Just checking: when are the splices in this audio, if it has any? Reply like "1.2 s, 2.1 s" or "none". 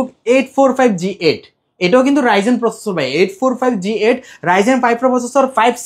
none